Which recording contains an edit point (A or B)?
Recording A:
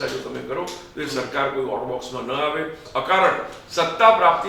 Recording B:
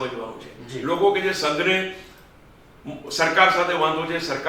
A